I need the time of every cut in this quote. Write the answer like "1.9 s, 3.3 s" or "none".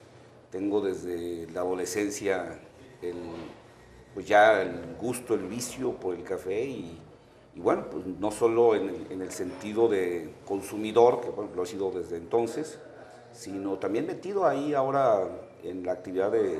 none